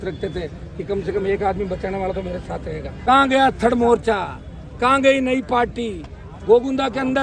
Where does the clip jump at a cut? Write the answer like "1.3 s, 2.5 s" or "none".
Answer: 2.9 s